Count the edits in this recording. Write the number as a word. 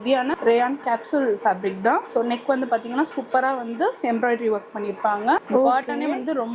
two